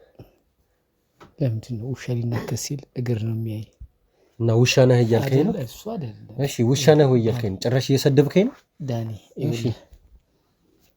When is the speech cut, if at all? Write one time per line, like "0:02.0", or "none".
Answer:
none